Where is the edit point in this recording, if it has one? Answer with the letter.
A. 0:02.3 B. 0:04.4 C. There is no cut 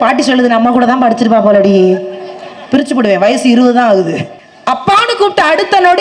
B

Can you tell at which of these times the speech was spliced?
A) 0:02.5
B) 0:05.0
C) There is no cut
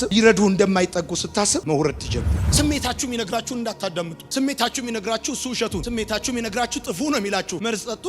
A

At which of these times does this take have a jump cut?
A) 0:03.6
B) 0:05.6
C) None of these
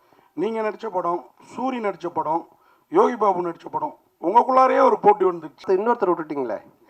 B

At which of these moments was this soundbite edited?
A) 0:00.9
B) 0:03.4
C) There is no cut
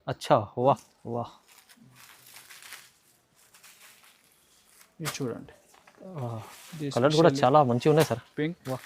A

